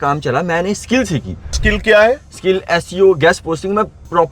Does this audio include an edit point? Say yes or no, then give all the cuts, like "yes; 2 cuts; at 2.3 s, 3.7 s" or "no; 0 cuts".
yes; 1 cut; at 1.6 s